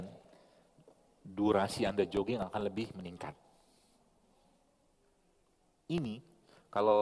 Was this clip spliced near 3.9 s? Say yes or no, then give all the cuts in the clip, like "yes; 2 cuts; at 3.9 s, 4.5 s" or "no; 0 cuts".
no; 0 cuts